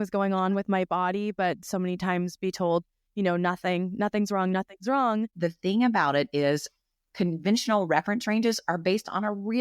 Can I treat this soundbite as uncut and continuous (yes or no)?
no